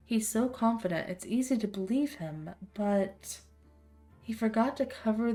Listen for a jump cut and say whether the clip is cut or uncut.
uncut